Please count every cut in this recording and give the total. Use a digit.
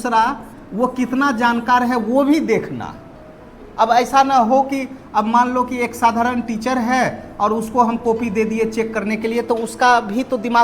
0